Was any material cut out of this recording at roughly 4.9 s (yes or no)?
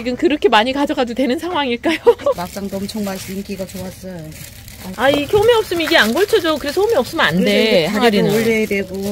yes